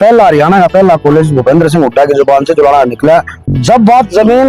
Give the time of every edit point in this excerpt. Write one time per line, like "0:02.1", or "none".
0:03.4